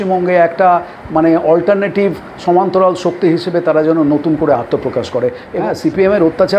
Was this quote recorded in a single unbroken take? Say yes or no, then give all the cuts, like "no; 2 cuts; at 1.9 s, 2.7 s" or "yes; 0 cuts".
no; 1 cut; at 5.5 s